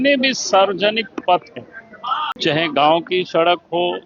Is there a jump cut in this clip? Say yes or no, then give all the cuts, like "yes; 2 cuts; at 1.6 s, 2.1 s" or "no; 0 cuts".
yes; 1 cut; at 2.4 s